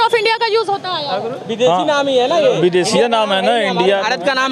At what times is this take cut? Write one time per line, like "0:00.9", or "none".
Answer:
none